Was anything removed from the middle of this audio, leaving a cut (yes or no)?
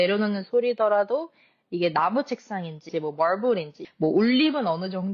yes